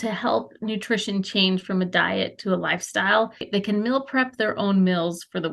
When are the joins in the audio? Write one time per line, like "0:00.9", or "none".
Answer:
0:03.5